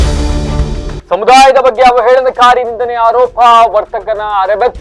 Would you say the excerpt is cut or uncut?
cut